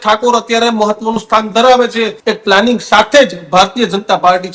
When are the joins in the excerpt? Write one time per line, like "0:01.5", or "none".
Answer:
0:02.2